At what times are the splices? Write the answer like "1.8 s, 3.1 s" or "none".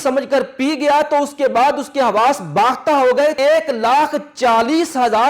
3.4 s